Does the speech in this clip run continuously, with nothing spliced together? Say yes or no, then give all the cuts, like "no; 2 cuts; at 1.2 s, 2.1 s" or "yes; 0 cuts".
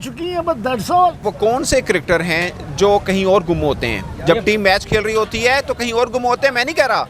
no; 1 cut; at 1.2 s